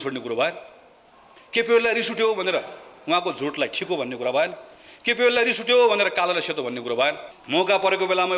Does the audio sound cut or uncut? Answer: cut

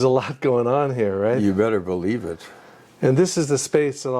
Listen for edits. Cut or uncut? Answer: uncut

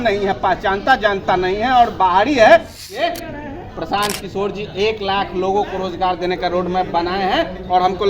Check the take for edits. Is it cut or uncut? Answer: cut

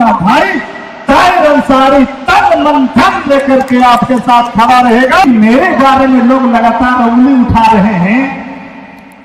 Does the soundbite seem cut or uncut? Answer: cut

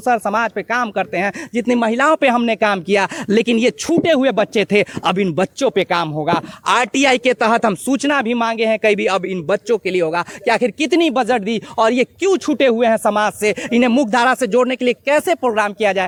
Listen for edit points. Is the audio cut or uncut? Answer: uncut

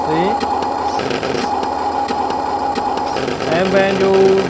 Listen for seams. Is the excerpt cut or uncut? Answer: uncut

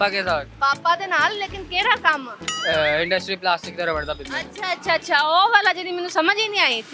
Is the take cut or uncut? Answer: uncut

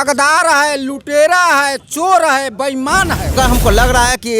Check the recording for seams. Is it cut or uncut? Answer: cut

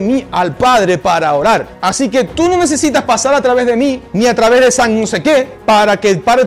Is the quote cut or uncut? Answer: cut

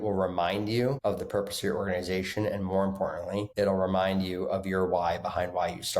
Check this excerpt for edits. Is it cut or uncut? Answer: cut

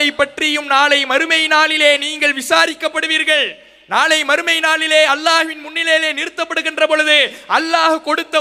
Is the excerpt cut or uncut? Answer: uncut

